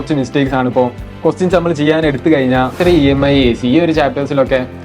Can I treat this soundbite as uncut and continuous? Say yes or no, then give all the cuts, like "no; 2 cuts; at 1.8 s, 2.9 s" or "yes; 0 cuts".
no; 1 cut; at 2.8 s